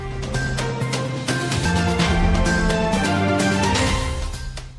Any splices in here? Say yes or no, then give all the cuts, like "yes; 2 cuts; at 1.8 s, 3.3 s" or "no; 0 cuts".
no; 0 cuts